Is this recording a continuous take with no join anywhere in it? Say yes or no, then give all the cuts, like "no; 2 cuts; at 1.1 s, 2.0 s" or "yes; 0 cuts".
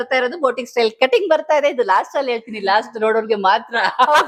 yes; 0 cuts